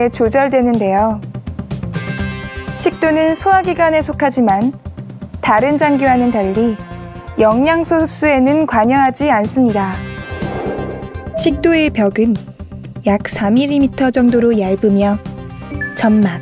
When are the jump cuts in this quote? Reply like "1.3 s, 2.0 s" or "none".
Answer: none